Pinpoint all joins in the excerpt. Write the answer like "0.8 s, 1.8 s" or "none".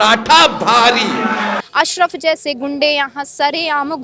1.6 s